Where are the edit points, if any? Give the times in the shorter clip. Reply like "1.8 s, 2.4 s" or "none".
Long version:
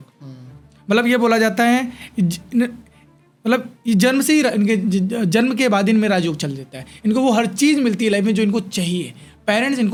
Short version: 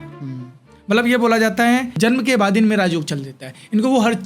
2.0 s